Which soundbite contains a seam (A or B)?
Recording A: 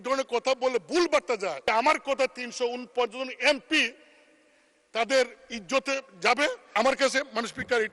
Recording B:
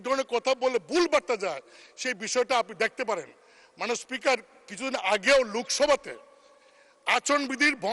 A